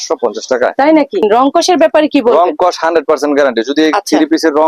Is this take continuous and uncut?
no; 1 cut; at 1.2 s

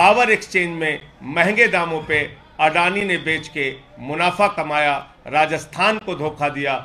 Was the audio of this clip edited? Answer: no; 0 cuts

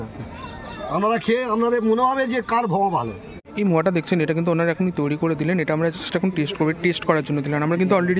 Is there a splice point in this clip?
yes; 1 cut; at 3.4 s

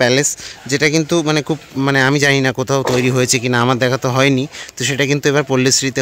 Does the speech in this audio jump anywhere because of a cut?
no; 0 cuts

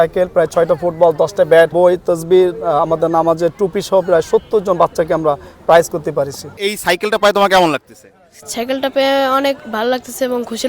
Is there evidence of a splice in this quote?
yes; 2 cuts; at 1.7 s, 6.5 s

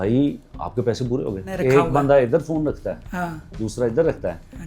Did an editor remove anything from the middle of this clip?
yes; 1 cut; at 1.5 s

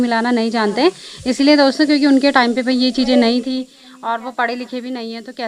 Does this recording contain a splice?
no; 0 cuts

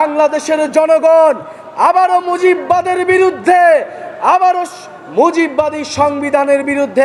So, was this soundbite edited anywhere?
no; 0 cuts

